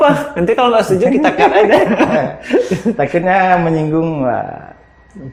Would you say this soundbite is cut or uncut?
uncut